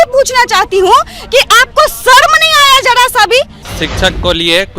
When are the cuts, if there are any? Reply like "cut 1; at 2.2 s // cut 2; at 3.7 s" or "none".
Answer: cut 1; at 3.6 s